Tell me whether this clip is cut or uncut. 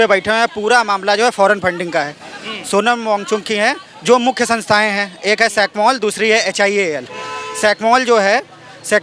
uncut